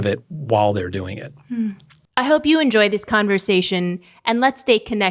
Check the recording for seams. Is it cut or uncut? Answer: cut